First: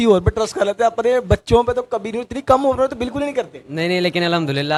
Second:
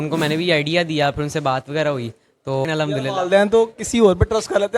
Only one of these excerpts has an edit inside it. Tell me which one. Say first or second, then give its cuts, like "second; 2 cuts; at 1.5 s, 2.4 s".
second; 1 cut; at 2.9 s